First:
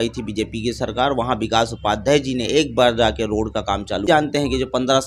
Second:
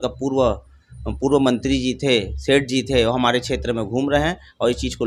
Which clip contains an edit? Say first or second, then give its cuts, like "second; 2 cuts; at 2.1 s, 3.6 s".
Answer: first; 1 cut; at 4.1 s